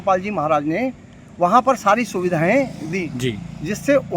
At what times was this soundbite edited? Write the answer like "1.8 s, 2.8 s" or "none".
3.0 s